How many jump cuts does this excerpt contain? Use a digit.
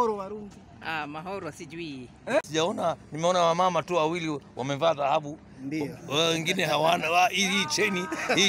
1